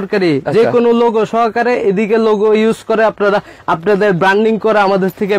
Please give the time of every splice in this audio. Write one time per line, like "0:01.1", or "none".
none